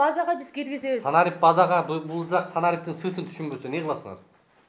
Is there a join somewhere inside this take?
no; 0 cuts

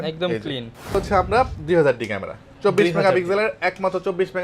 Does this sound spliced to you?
yes; 1 cut; at 0.9 s

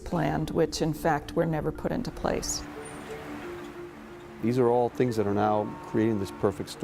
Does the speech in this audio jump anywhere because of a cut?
yes; 1 cut; at 5.2 s

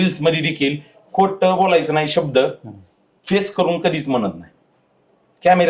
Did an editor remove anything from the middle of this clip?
no; 0 cuts

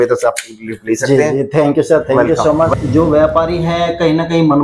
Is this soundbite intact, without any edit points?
no; 1 cut; at 2.8 s

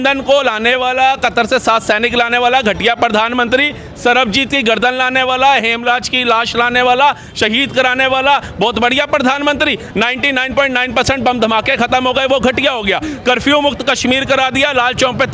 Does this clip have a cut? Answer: no; 0 cuts

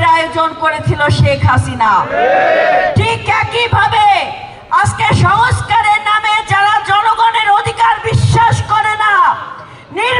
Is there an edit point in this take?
no; 0 cuts

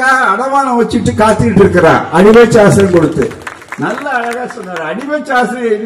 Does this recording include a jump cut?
no; 0 cuts

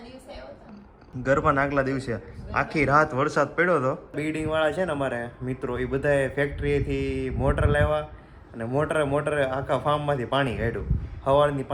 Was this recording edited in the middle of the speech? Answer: yes; 2 cuts; at 1.0 s, 4.2 s

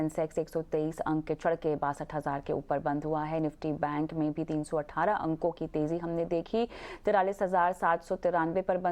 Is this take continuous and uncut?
no; 1 cut; at 6.8 s

